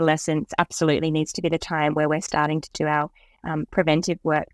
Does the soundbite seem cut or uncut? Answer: uncut